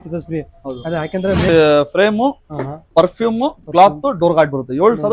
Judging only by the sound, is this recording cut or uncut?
cut